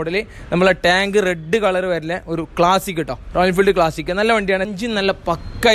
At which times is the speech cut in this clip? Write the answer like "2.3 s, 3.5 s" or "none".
4.7 s